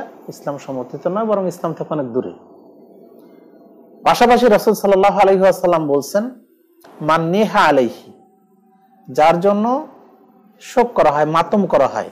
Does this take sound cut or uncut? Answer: uncut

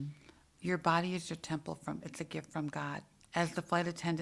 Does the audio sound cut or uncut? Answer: cut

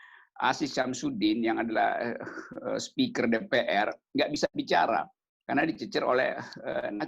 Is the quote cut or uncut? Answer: uncut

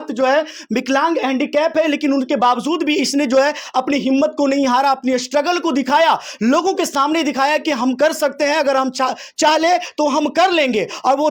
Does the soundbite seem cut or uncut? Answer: uncut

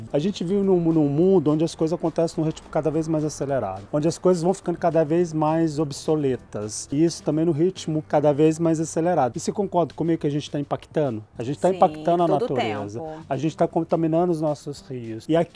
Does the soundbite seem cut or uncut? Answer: uncut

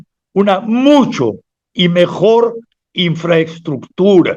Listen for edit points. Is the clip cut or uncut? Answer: uncut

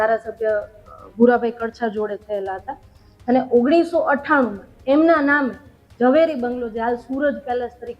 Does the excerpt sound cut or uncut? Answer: uncut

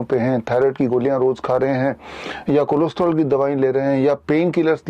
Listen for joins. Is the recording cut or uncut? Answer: uncut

